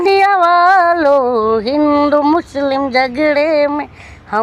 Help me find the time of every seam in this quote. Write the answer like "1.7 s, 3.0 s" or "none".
none

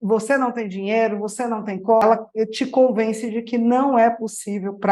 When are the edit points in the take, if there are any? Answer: 2.0 s

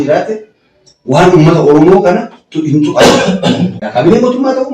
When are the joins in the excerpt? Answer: 3.8 s

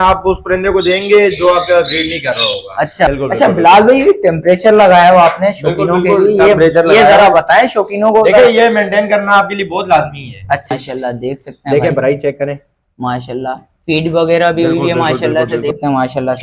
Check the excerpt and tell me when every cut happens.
3.1 s, 10.7 s, 15.7 s

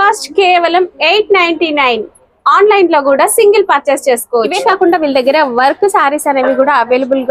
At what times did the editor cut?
4.6 s

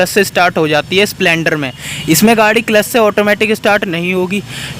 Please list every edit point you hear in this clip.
none

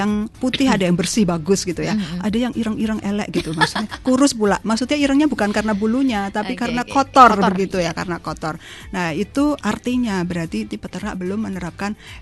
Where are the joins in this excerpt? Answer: none

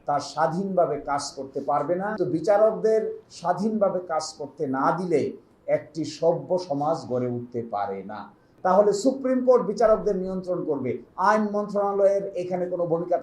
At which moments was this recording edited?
2.2 s, 8.5 s

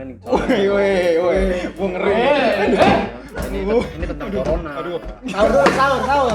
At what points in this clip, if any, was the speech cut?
none

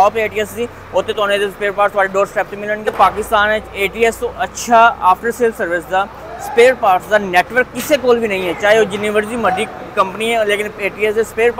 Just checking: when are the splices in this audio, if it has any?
2.9 s

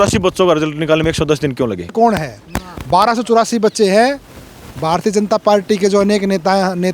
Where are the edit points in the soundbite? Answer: 1.9 s

